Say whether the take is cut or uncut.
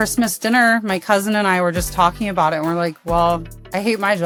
uncut